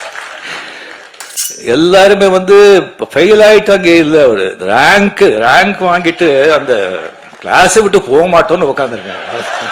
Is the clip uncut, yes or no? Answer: no